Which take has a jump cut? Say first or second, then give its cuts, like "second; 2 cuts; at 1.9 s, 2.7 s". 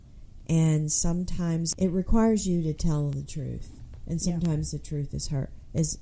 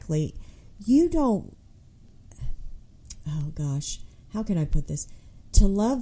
first; 1 cut; at 1.7 s